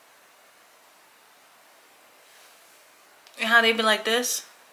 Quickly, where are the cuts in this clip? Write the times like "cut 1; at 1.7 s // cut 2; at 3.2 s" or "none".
none

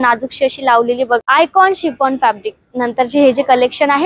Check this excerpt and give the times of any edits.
cut 1; at 1.2 s

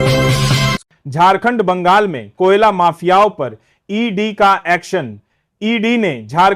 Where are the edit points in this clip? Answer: cut 1; at 0.9 s

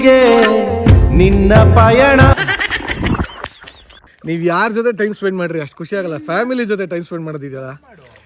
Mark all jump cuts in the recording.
cut 1; at 4.1 s

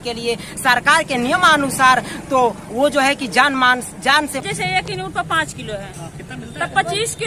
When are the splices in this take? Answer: cut 1; at 4.4 s

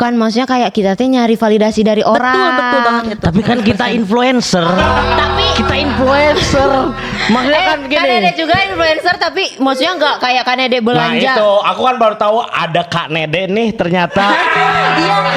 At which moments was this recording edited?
none

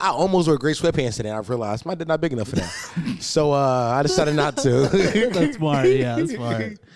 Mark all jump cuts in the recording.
none

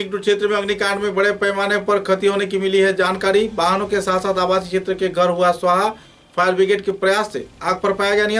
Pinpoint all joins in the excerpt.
none

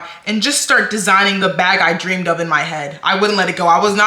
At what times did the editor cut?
cut 1; at 1.4 s

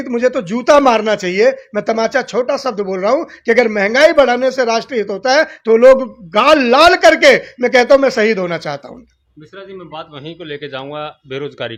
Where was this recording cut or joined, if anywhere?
none

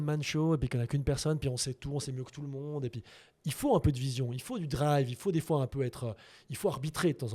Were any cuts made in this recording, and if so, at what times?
none

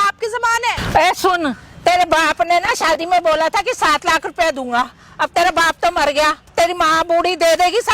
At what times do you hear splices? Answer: cut 1; at 0.8 s // cut 2; at 6.4 s

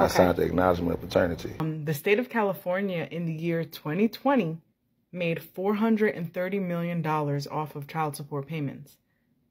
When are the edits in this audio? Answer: cut 1; at 1.7 s

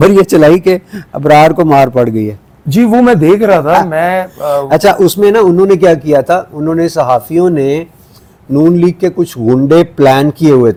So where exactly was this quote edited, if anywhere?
none

